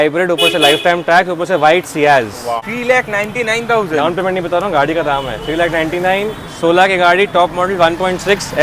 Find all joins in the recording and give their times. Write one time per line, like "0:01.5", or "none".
0:02.6